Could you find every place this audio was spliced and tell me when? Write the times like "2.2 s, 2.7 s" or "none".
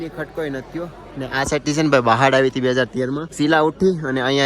3.3 s